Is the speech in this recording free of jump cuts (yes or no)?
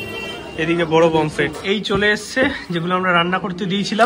no